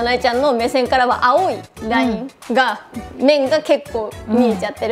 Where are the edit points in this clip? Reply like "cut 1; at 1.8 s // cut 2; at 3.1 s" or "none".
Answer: none